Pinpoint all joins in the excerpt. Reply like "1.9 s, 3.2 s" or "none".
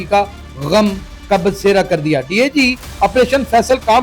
none